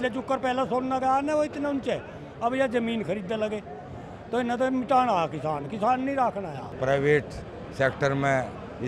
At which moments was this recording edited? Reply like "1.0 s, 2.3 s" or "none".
6.6 s

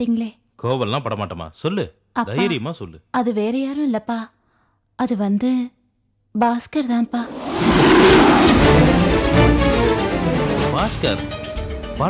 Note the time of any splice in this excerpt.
10.6 s

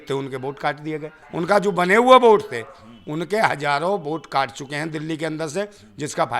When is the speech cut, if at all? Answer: 1.2 s

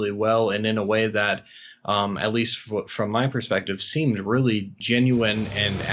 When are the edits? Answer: 4.8 s

